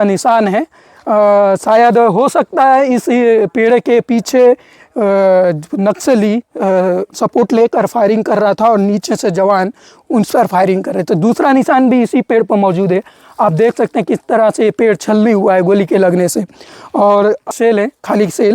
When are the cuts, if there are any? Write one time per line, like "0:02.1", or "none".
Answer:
0:17.5